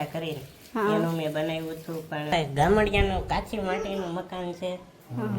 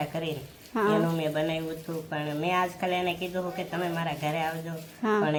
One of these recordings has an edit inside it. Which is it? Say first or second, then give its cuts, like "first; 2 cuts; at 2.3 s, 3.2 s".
first; 1 cut; at 2.3 s